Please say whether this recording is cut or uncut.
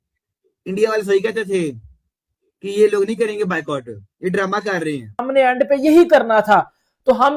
cut